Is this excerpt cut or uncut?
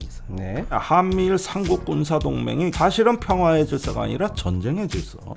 cut